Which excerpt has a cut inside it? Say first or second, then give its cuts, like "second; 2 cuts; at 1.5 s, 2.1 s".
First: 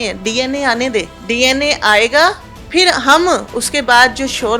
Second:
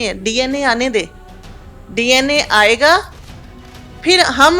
first; 2 cuts; at 1.2 s, 2.5 s